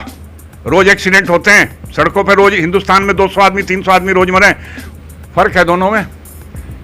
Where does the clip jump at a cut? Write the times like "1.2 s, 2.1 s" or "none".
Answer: 4.9 s